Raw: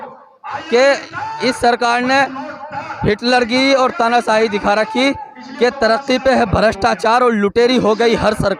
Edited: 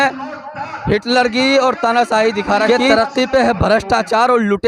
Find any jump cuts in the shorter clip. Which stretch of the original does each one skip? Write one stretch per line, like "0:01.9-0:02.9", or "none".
0:04.8-0:05.6